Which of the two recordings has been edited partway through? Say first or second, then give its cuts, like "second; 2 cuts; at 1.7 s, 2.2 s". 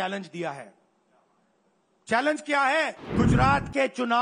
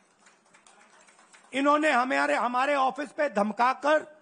first; 1 cut; at 3.0 s